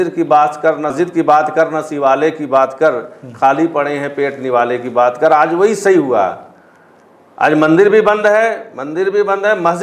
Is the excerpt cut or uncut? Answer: cut